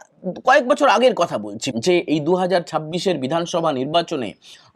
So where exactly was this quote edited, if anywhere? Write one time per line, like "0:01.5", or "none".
0:01.6